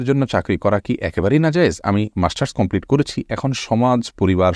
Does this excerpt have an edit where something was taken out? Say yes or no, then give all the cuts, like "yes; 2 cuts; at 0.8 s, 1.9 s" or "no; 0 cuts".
no; 0 cuts